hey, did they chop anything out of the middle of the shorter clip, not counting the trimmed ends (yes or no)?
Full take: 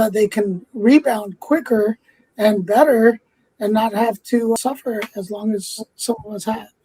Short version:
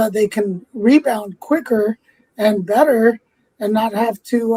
no